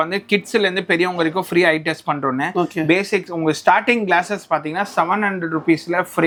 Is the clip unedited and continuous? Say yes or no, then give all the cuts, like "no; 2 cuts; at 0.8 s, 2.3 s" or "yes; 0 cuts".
yes; 0 cuts